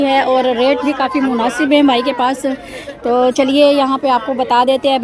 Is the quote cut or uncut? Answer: uncut